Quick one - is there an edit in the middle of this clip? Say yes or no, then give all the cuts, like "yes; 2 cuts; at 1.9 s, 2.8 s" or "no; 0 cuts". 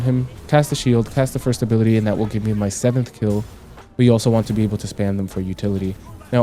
yes; 1 cut; at 3.7 s